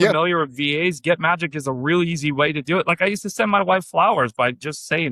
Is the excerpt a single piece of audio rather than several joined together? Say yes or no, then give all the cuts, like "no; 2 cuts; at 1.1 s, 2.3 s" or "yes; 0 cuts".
yes; 0 cuts